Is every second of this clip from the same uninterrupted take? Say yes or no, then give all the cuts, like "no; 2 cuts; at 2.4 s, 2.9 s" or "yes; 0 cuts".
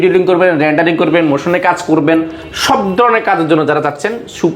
yes; 0 cuts